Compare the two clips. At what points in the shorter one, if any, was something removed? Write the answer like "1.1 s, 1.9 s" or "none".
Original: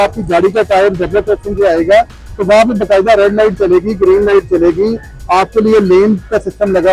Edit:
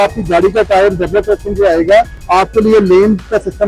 2.2 s